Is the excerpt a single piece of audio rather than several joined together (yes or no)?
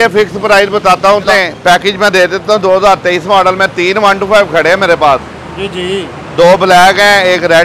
no